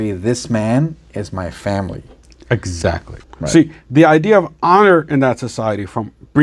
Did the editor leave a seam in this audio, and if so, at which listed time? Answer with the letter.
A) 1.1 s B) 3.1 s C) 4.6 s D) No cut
B